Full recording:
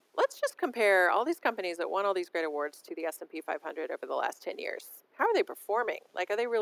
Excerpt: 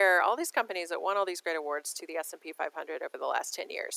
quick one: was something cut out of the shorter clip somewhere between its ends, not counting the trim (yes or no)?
no